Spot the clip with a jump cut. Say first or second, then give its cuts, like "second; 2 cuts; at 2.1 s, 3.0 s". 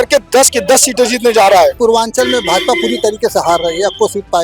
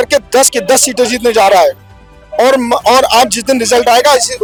first; 1 cut; at 1.7 s